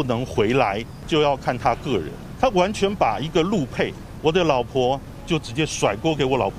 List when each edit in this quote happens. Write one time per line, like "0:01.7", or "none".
0:00.9
0:02.2
0:04.0
0:05.1